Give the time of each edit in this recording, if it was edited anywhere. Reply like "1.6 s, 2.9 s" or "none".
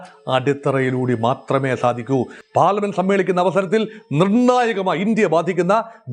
2.4 s